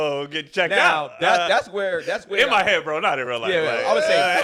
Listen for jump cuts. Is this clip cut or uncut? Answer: uncut